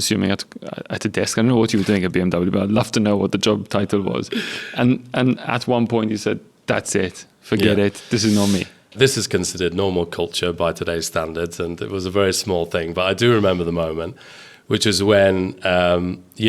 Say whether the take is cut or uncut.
cut